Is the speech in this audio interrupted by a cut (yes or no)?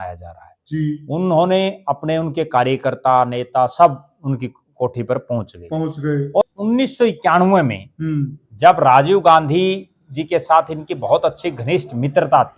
yes